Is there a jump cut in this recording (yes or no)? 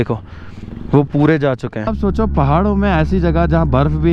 yes